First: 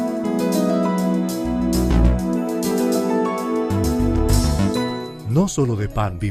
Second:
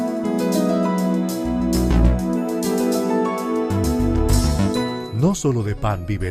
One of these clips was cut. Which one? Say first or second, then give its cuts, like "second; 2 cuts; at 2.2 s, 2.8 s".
second; 1 cut; at 5.1 s